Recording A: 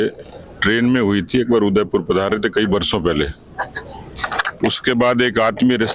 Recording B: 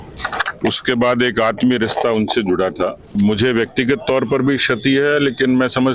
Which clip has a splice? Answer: B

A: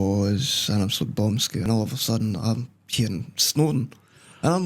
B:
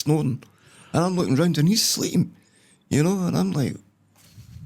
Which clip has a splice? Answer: A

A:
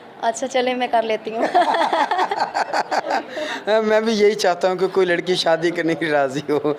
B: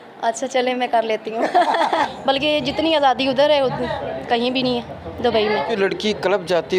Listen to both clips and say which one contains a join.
B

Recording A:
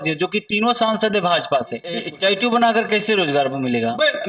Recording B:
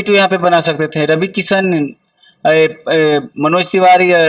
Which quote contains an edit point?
A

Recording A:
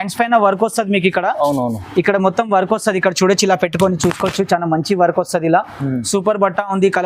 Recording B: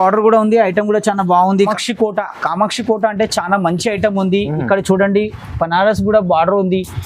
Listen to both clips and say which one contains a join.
B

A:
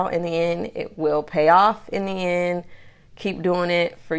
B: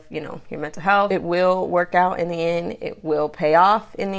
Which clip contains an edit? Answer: B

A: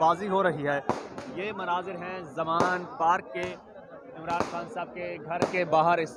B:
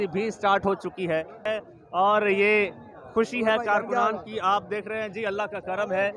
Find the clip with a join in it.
B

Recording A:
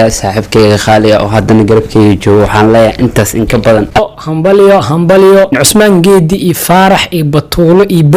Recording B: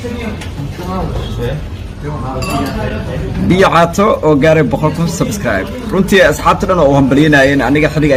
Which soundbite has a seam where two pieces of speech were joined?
A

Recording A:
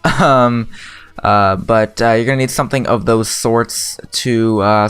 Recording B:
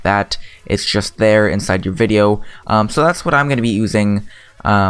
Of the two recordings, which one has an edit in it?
A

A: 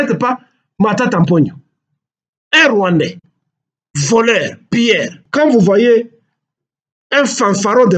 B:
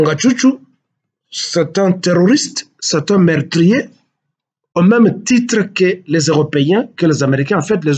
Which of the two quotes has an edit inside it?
A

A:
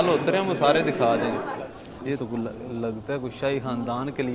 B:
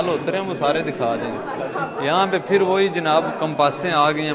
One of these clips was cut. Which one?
A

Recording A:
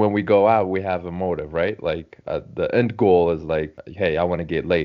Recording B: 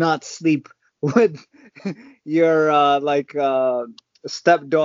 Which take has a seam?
A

